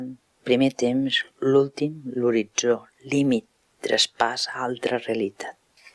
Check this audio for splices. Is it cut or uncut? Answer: cut